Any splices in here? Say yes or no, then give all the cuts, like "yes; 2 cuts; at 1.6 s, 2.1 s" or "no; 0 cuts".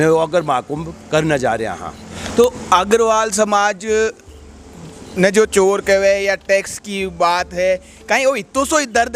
no; 0 cuts